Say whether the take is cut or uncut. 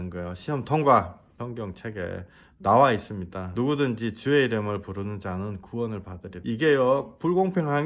cut